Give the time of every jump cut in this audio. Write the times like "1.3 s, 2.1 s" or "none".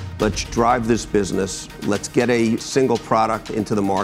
2.6 s